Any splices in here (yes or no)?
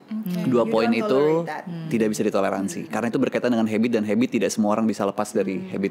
no